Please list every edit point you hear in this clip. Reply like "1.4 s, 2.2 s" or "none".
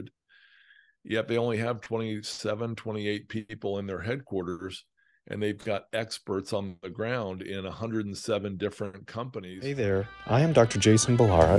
9.5 s